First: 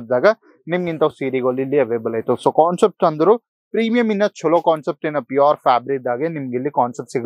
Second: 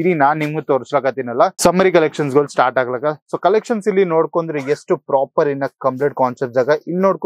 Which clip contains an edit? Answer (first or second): second